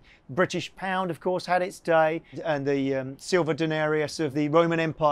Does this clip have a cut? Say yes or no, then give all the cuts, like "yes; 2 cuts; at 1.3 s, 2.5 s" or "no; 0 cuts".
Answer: yes; 1 cut; at 2.4 s